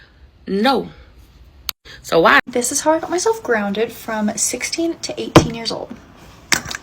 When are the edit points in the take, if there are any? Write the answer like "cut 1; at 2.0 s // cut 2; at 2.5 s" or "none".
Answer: cut 1; at 2.4 s